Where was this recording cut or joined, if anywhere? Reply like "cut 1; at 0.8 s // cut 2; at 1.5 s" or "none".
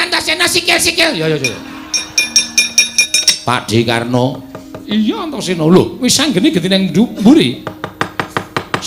cut 1; at 3.1 s